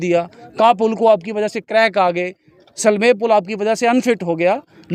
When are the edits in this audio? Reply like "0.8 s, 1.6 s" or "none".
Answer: none